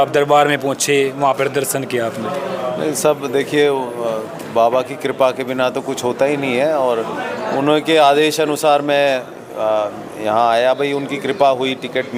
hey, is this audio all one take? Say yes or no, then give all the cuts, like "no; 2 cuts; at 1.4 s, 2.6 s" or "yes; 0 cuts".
yes; 0 cuts